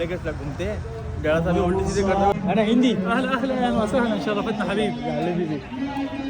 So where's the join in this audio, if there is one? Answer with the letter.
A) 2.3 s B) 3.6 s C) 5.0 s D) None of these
A